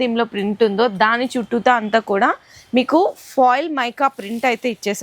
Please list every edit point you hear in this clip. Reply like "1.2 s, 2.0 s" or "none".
none